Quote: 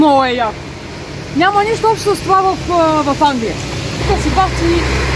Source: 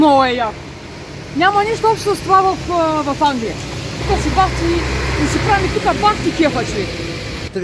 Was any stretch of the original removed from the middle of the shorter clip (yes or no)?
no